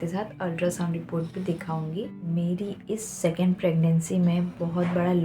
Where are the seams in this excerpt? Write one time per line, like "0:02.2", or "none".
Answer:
0:02.2